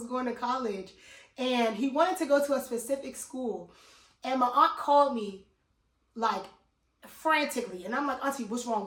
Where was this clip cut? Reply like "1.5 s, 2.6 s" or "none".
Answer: none